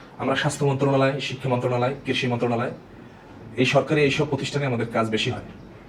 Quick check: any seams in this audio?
no; 0 cuts

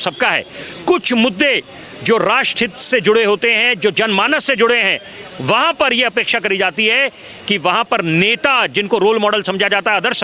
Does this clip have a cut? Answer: no; 0 cuts

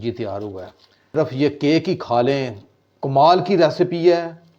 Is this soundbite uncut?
yes; 0 cuts

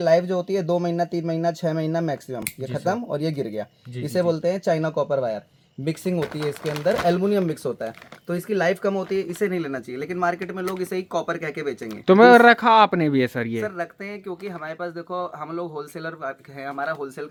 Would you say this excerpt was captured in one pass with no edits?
yes; 0 cuts

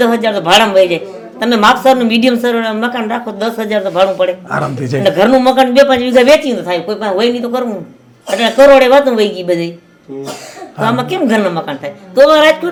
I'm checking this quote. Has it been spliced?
no; 0 cuts

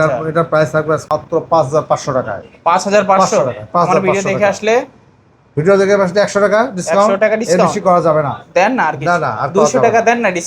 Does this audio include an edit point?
yes; 1 cut; at 1.1 s

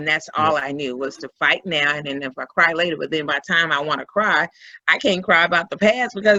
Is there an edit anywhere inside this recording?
no; 0 cuts

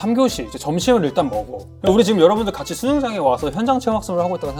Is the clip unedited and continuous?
yes; 0 cuts

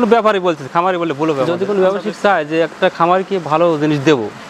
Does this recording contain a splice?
yes; 1 cut; at 1.5 s

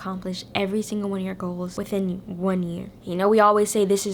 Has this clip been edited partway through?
yes; 2 cuts; at 1.7 s, 3.0 s

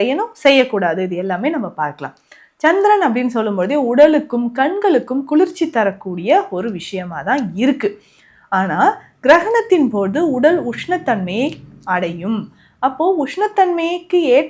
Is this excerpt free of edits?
yes; 0 cuts

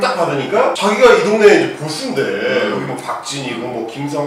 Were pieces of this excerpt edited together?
no; 0 cuts

